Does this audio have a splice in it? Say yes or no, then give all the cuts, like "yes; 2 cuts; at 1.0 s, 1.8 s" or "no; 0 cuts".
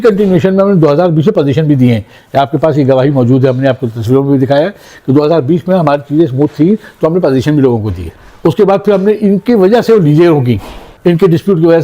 no; 0 cuts